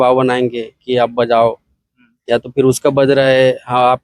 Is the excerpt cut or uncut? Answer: uncut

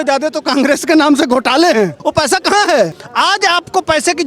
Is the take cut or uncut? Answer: cut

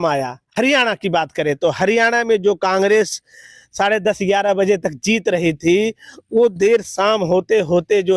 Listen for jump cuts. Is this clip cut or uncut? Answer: uncut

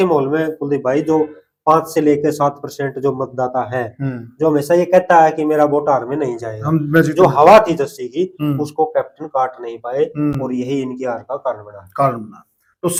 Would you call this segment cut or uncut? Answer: uncut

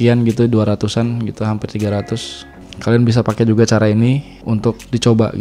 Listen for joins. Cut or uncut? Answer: uncut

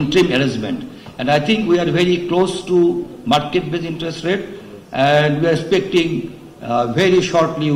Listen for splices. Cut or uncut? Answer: uncut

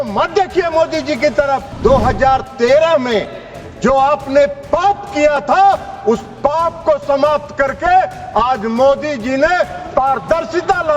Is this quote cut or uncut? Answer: cut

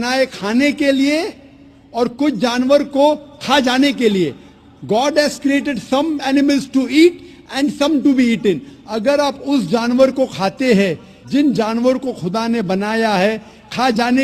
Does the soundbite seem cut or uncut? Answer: uncut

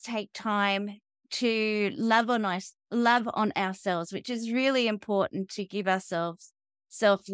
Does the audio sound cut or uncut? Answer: uncut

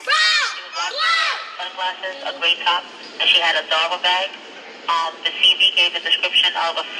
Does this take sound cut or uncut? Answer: cut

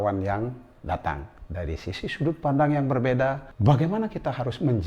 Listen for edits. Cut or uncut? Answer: cut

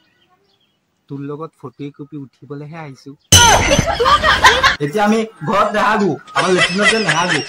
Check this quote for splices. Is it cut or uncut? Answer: cut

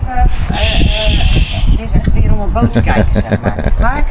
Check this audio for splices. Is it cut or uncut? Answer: uncut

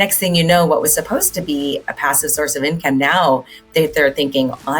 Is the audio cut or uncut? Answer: uncut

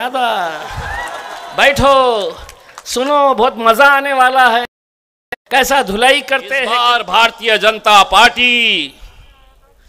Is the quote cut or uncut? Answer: cut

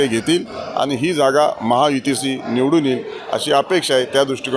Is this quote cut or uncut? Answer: uncut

